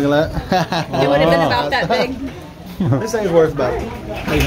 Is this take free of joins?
no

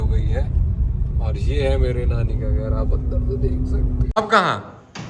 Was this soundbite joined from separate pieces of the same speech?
yes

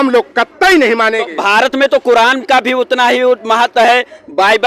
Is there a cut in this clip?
no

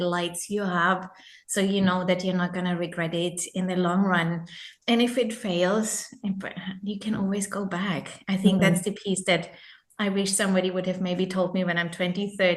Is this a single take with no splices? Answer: yes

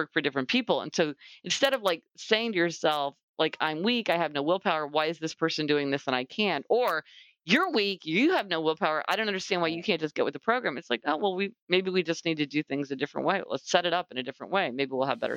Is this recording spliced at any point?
no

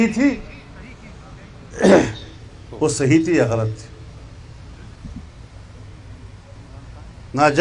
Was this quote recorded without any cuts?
no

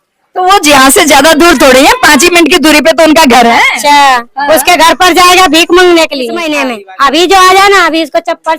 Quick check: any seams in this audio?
yes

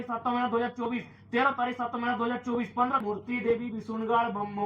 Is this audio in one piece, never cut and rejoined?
no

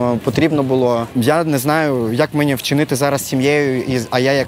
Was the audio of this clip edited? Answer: yes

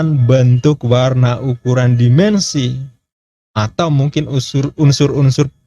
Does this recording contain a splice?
no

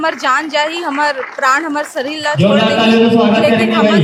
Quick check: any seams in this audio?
no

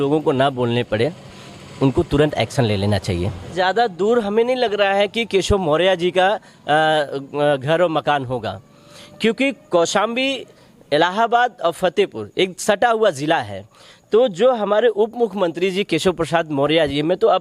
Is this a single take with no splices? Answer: no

